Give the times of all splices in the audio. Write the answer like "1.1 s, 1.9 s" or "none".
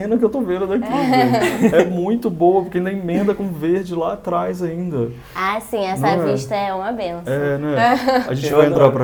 none

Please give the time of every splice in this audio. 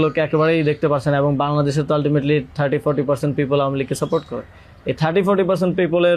none

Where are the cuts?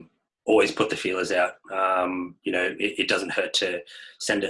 none

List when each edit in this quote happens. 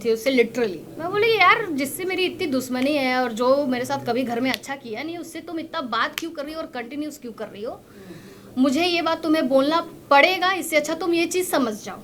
none

